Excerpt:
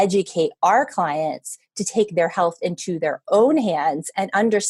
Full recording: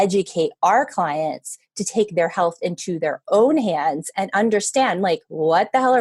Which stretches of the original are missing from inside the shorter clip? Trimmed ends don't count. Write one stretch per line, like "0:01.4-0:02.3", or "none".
none

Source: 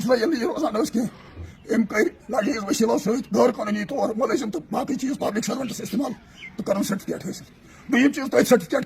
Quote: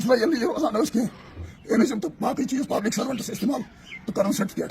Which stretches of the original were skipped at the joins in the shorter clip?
0:01.8-0:04.3

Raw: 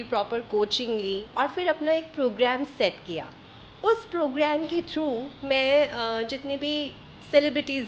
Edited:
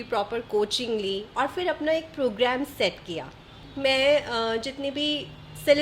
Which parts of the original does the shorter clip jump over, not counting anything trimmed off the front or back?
0:03.7-0:05.3

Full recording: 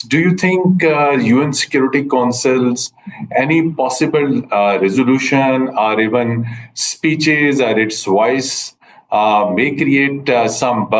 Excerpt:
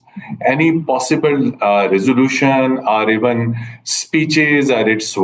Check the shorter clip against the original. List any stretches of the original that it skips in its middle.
none

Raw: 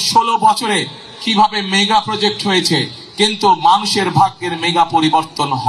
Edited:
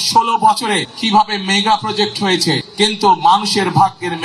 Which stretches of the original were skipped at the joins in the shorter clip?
0:00.9-0:01.2
0:02.9-0:03.1

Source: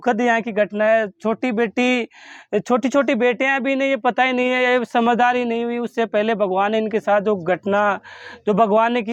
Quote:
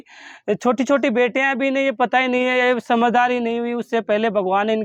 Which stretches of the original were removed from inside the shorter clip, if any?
none

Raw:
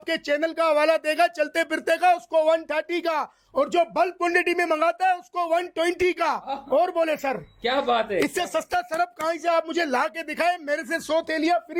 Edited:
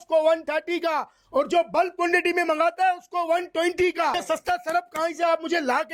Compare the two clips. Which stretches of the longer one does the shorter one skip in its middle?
0:06.4-0:08.4

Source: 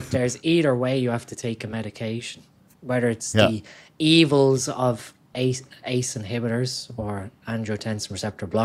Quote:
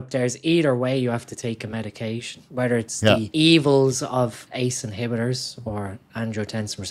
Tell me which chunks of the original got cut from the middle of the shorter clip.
0:02.4-0:02.7
0:03.6-0:03.9
0:05.1-0:05.8

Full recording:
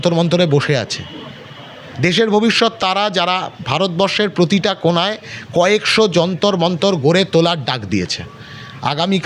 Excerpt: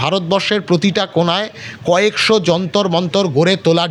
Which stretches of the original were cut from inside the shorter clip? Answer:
none

